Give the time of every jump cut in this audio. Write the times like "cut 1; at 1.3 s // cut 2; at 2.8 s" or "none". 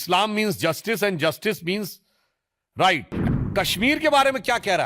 cut 1; at 3.2 s